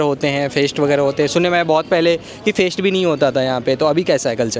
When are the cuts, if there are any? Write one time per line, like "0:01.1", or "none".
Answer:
none